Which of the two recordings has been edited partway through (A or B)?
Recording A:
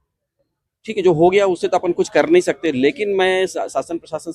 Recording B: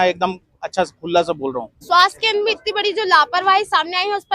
B